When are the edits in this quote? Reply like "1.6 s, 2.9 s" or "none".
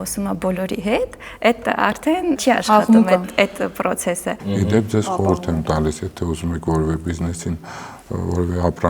2.4 s, 4.4 s